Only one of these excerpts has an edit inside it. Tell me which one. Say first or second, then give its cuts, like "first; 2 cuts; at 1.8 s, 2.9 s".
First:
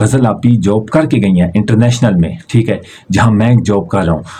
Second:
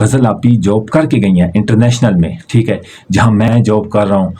second; 1 cut; at 3.5 s